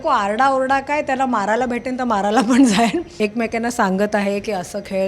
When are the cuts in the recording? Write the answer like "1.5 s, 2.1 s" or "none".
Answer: 3.1 s